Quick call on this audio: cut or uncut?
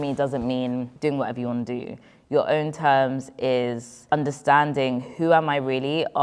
cut